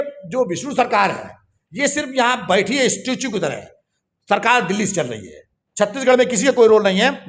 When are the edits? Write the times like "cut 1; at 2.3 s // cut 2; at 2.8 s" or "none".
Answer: none